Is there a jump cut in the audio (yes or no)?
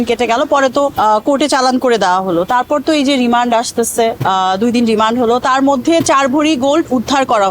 no